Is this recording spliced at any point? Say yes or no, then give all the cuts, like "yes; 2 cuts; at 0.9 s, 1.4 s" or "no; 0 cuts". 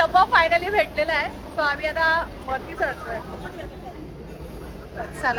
no; 0 cuts